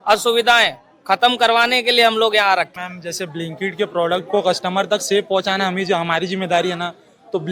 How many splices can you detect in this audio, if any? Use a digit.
1